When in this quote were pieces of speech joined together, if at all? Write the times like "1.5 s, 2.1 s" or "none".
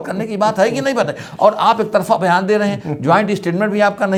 none